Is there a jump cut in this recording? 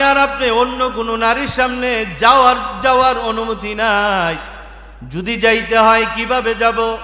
no; 0 cuts

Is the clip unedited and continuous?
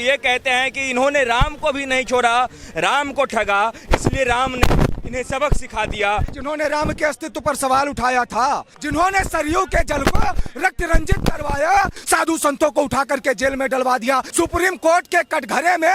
no; 4 cuts; at 6.3 s, 8.7 s, 12.0 s, 14.3 s

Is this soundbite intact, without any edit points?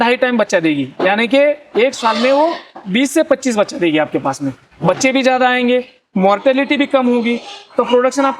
yes; 0 cuts

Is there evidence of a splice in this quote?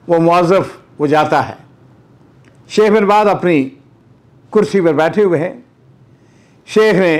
no; 0 cuts

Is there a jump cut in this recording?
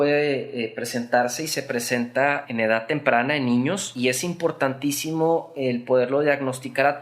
yes; 2 cuts; at 2.4 s, 3.9 s

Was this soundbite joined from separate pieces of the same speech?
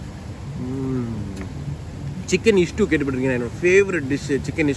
yes; 1 cut; at 1.9 s

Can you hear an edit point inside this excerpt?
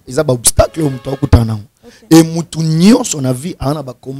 no; 0 cuts

